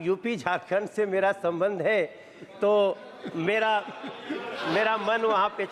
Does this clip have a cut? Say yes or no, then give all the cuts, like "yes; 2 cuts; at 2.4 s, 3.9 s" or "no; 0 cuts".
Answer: no; 0 cuts